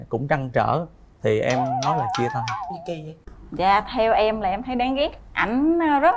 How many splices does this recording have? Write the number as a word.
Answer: one